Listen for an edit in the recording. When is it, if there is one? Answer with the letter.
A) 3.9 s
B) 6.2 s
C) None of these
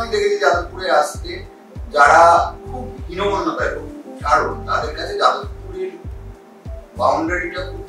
C